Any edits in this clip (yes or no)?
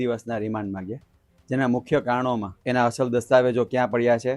yes